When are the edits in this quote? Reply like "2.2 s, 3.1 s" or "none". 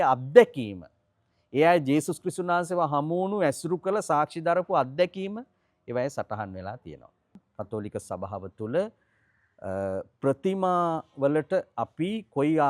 7.5 s

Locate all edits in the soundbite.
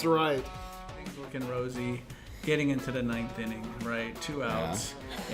1.0 s

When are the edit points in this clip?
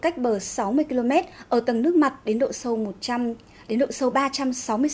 1.9 s

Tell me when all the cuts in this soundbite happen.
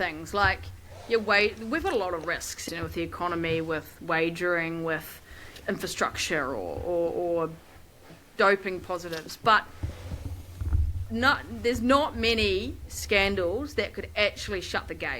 2.6 s, 5.5 s, 8.1 s

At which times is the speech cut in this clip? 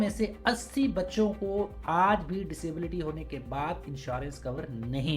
none

